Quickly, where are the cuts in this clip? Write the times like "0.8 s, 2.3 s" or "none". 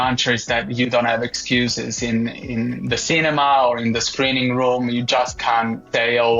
none